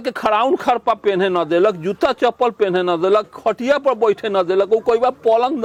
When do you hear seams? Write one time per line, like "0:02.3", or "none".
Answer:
none